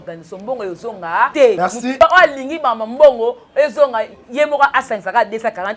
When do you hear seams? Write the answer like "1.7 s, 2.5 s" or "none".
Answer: 1.7 s